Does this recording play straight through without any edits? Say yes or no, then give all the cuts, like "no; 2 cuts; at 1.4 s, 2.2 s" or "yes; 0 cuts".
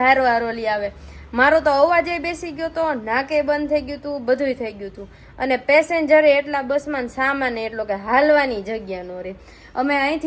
yes; 0 cuts